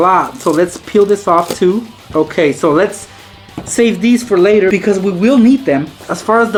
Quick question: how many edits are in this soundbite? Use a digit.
0